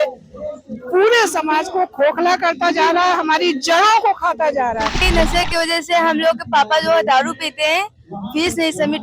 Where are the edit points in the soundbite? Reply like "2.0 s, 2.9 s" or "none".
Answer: 5.0 s